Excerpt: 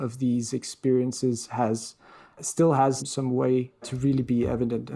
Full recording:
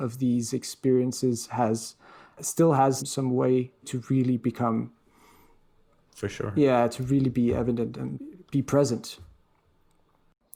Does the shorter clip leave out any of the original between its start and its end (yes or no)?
yes